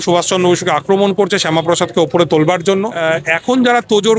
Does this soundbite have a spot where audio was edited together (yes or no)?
yes